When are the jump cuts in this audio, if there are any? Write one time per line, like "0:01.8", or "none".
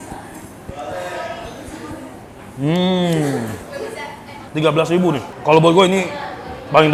none